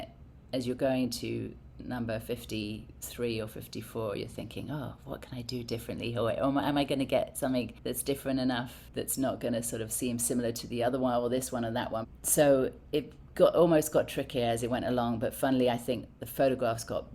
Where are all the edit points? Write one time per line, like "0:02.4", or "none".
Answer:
0:07.8
0:08.8
0:12.1
0:12.8